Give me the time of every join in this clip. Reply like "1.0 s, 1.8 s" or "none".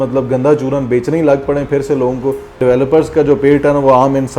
2.6 s